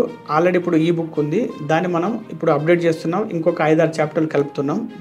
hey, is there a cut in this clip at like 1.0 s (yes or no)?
no